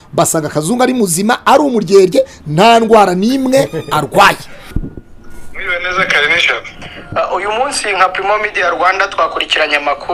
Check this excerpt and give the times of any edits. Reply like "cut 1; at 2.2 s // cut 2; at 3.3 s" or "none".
cut 1; at 4.6 s